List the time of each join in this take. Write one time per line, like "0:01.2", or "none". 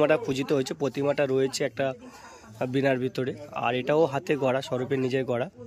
none